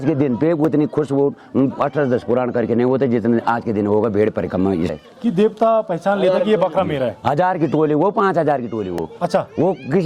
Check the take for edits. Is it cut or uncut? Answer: cut